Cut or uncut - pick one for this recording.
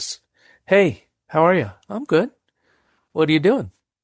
uncut